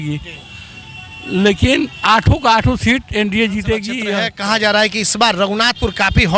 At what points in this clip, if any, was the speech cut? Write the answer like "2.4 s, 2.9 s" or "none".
4.0 s